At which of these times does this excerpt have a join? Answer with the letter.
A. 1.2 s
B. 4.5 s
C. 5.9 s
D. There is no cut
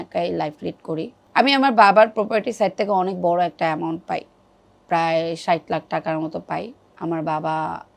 A